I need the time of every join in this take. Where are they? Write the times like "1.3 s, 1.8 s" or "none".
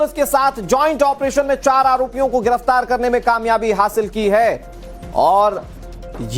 none